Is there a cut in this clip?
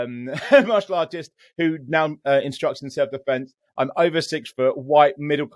no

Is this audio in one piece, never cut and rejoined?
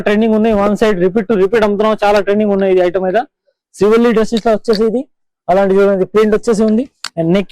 yes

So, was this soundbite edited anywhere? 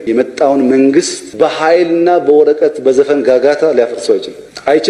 no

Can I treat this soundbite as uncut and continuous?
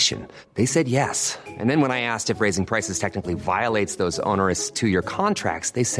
yes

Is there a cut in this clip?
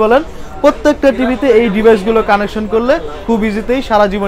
no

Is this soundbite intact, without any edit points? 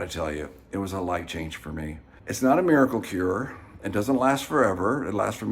no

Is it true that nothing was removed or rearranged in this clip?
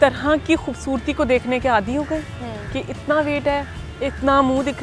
yes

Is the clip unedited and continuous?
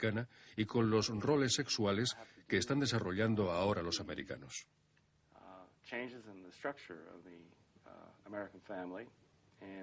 yes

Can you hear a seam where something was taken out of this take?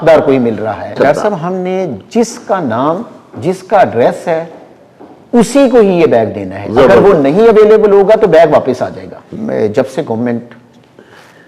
yes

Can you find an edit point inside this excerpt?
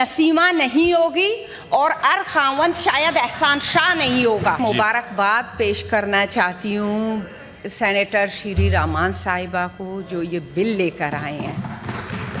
yes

